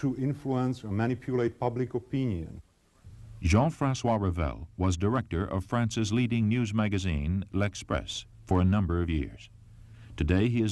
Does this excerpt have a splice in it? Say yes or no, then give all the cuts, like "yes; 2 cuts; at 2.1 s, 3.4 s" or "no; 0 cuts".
yes; 1 cut; at 2.5 s